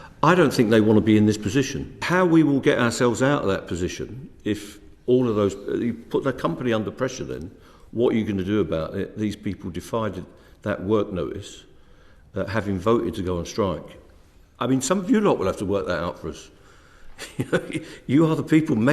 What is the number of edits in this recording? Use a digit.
1